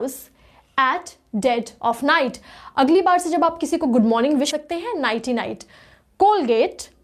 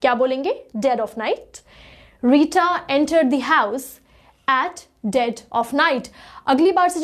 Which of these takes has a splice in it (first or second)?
first